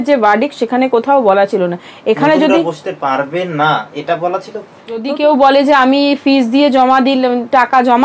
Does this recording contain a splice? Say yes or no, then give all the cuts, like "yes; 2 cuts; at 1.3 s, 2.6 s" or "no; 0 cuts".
yes; 1 cut; at 5.0 s